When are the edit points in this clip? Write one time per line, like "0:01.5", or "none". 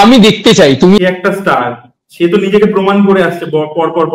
0:01.0